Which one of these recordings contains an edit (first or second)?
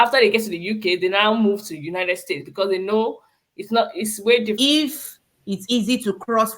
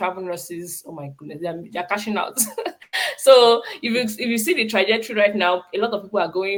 first